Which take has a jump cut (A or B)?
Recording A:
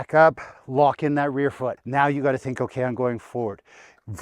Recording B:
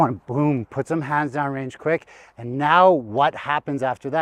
A